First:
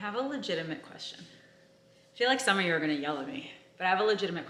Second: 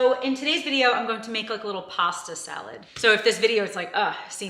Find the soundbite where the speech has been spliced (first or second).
second